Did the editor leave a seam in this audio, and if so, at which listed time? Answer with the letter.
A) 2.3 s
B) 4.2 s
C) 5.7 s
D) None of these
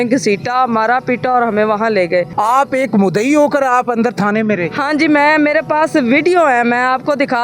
A